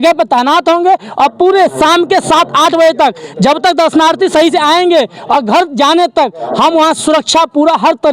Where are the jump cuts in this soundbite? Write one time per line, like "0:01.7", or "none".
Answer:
none